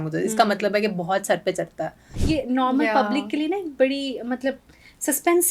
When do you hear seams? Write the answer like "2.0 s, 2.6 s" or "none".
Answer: 2.1 s